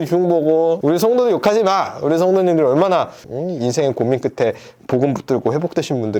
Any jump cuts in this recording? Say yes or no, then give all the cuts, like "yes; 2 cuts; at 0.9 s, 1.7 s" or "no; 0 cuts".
no; 0 cuts